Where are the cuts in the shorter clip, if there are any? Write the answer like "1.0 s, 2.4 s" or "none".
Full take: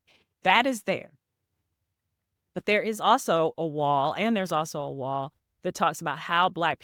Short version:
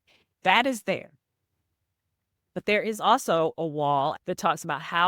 4.2 s